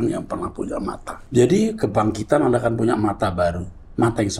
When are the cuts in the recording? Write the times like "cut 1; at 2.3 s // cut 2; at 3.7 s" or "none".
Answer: cut 1; at 1.1 s